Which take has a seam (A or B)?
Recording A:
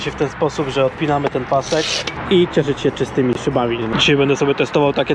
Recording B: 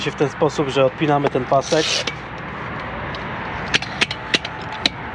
A